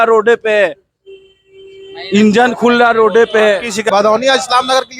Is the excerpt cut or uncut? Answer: cut